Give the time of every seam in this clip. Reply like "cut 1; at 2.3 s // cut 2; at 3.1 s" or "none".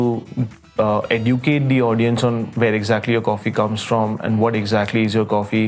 none